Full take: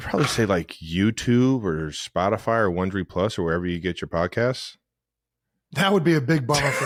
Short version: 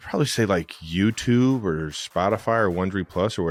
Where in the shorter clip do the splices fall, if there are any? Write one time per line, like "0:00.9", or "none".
none